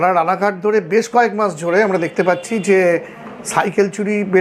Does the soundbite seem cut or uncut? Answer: uncut